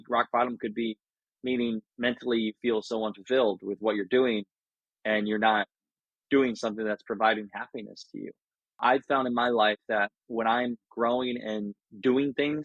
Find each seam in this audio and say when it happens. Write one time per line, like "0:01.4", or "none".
0:08.6